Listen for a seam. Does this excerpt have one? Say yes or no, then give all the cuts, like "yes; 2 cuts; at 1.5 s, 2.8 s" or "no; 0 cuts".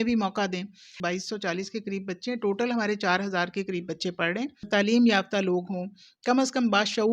yes; 2 cuts; at 1.0 s, 4.7 s